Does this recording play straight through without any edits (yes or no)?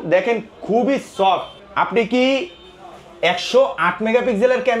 no